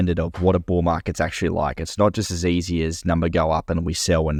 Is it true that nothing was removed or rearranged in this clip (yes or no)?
yes